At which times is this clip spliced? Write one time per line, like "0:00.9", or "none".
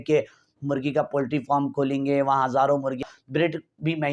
0:03.0